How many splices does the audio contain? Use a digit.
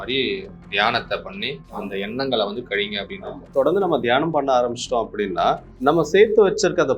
3